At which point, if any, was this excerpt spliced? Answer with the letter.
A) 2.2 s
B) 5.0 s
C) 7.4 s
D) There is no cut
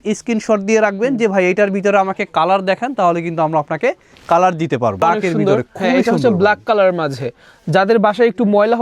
B